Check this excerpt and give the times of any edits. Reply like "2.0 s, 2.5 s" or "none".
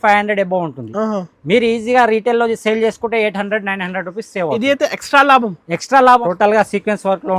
6.2 s